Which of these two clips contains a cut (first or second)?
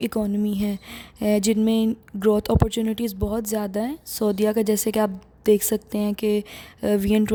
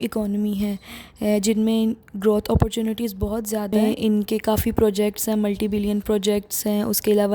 second